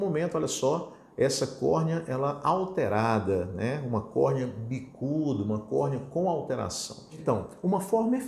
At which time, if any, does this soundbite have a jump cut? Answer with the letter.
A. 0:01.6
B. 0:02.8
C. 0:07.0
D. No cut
C